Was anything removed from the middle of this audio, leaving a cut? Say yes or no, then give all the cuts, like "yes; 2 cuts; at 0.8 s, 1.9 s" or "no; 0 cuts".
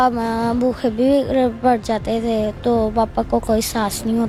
no; 0 cuts